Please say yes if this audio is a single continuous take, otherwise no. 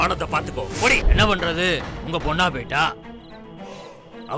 no